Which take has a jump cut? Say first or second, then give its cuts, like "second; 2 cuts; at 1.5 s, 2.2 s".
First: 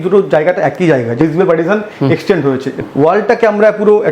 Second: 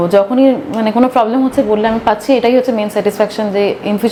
first; 2 cuts; at 1.2 s, 2.8 s